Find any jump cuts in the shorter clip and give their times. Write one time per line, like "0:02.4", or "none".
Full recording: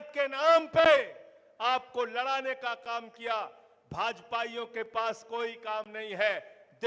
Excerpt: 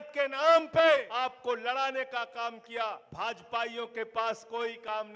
0:01.1
0:03.1